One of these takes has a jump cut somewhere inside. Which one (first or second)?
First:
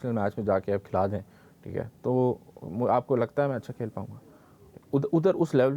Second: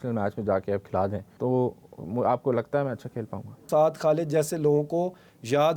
second